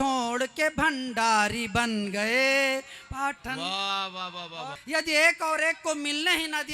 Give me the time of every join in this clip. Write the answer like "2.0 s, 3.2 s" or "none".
4.7 s